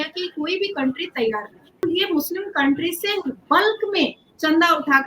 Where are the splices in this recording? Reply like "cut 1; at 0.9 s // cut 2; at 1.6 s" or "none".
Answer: cut 1; at 1.8 s